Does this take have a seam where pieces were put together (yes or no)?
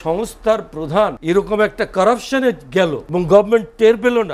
yes